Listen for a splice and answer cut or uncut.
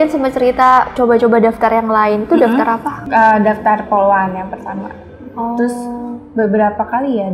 uncut